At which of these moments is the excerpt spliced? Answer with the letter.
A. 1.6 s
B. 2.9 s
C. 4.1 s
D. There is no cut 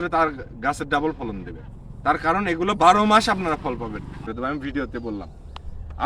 C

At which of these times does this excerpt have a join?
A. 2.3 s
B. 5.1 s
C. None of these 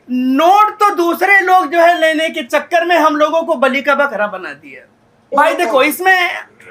B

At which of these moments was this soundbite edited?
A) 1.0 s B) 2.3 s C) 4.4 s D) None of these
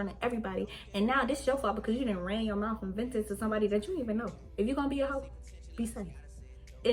C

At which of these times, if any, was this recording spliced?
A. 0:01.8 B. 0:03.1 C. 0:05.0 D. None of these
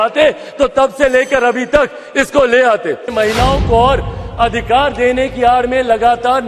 B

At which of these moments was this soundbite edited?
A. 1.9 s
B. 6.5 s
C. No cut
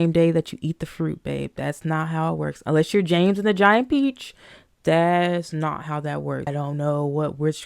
B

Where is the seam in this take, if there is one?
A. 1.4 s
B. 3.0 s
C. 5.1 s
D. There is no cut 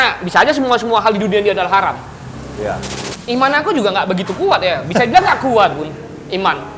B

